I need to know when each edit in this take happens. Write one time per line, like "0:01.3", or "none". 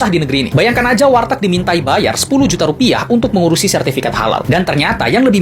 none